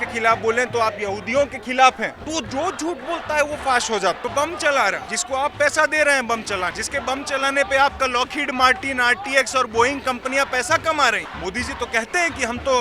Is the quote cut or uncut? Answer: cut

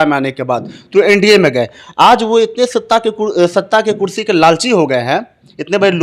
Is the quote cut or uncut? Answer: uncut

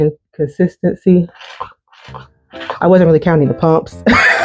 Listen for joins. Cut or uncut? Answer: uncut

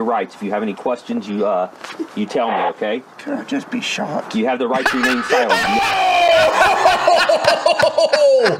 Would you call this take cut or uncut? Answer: uncut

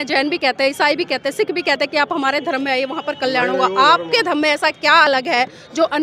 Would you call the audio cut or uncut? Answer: uncut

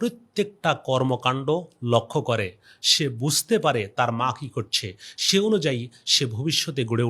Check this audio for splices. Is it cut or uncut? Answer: uncut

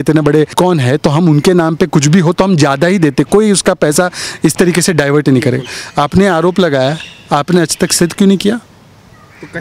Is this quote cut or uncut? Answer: uncut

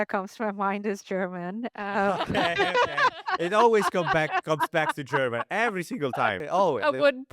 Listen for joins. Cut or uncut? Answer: cut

